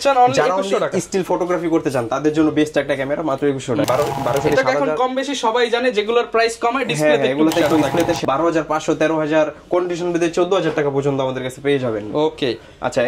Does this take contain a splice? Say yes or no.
yes